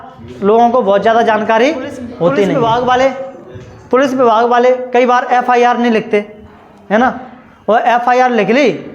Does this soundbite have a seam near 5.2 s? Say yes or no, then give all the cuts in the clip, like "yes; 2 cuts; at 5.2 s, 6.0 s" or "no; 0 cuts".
no; 1 cut; at 2.5 s